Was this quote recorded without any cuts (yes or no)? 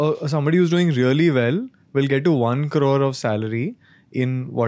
yes